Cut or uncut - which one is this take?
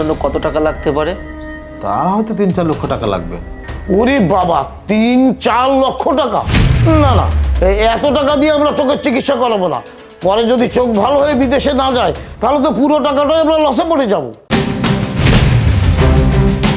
cut